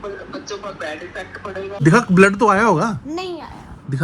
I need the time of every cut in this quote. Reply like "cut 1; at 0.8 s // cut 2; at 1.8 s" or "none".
cut 1; at 1.8 s